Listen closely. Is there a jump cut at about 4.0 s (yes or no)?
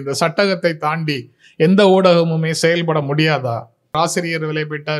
yes